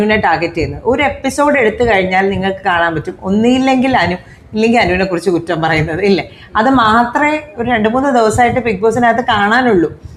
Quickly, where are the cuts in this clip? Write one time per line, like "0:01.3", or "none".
none